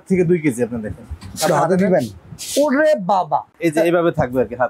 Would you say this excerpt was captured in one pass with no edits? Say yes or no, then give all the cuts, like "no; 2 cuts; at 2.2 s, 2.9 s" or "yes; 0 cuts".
no; 1 cut; at 3.5 s